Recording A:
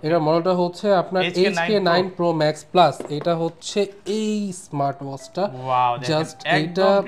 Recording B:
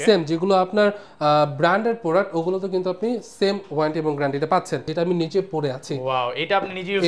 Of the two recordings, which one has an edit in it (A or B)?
B